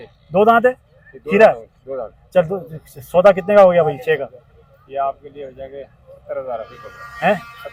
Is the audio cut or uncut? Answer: uncut